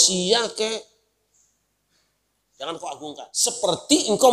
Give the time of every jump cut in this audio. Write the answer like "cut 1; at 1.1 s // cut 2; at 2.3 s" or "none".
cut 1; at 3.3 s

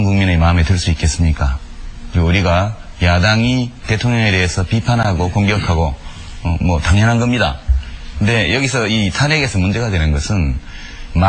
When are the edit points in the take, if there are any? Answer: none

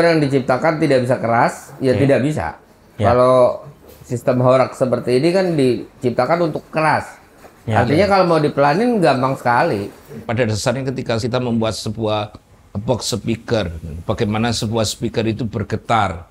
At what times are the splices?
cut 1; at 10.3 s // cut 2; at 11.2 s

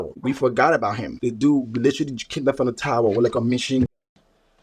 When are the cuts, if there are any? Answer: cut 1; at 1.1 s

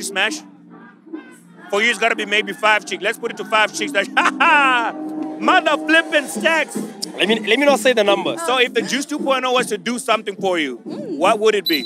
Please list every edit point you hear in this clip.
cut 1; at 8.3 s // cut 2; at 10.9 s

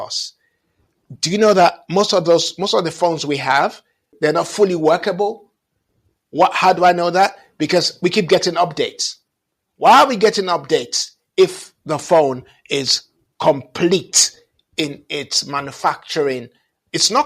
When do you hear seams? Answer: cut 1; at 4.1 s

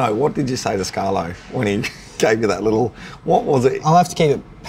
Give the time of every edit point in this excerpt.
none

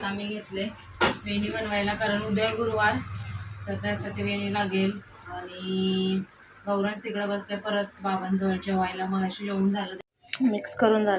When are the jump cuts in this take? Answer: cut 1; at 9.9 s

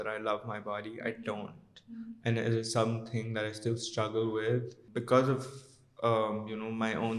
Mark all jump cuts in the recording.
cut 1; at 4.8 s

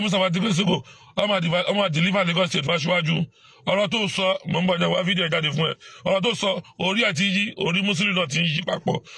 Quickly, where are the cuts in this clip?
none

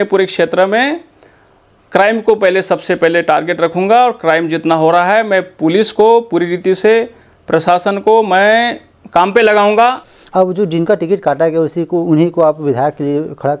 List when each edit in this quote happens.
cut 1; at 10.1 s

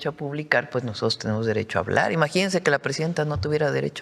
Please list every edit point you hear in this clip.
none

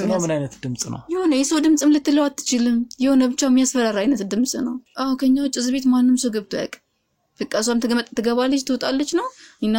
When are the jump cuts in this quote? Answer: cut 1; at 4.9 s

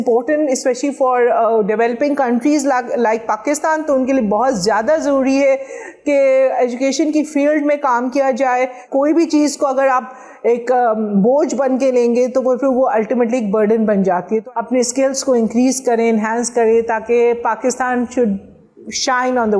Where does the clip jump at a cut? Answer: cut 1; at 8.9 s // cut 2; at 14.4 s

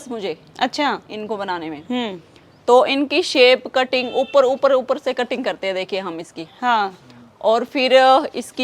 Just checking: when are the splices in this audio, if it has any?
none

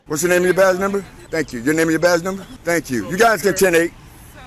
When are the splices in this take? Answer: cut 1; at 1.2 s // cut 2; at 2.5 s

